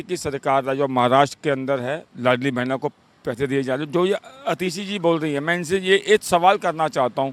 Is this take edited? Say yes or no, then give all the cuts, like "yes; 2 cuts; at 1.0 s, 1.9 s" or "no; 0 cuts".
no; 0 cuts